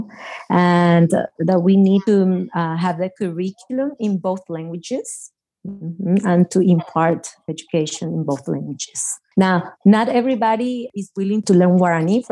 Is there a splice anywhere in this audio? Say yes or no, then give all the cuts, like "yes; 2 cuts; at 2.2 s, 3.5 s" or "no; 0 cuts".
yes; 2 cuts; at 9.5 s, 10.9 s